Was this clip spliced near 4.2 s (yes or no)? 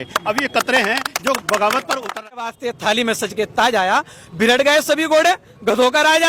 no